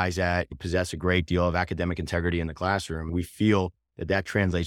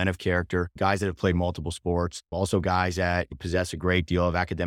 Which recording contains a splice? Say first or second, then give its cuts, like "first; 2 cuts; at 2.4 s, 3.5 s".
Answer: first; 1 cut; at 3.1 s